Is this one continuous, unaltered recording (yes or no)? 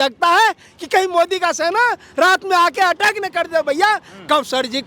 yes